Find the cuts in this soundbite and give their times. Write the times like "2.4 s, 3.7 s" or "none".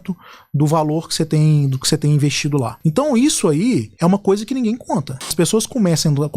2.7 s, 3.9 s, 5.3 s